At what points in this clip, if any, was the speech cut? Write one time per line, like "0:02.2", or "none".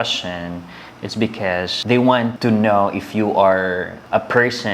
none